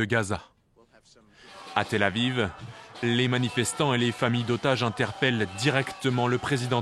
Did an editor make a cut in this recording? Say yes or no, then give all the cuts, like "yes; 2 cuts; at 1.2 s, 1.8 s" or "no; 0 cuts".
yes; 1 cut; at 2.3 s